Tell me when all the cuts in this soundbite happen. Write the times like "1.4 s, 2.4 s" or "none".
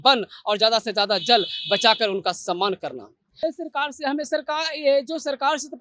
3.4 s